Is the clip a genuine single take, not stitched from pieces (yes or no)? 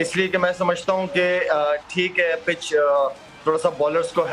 yes